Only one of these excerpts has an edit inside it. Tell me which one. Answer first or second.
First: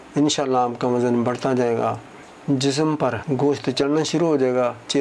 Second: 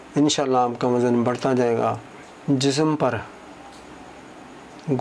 first